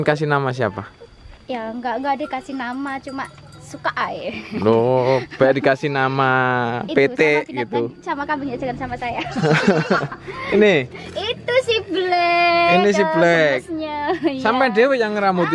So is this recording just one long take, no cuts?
yes; 0 cuts

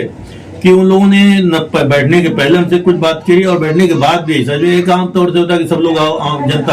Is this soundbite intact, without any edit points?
yes; 0 cuts

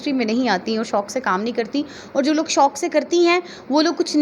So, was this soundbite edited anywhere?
no; 0 cuts

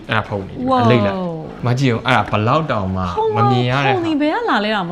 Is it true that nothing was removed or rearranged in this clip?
no; 1 cut; at 1.5 s

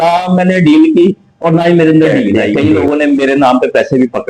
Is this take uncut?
no; 1 cut; at 2.5 s

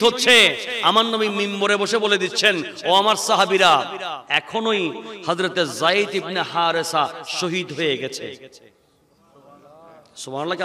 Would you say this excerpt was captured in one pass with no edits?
yes; 0 cuts

